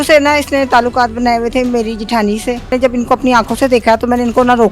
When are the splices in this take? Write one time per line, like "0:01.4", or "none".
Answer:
0:02.7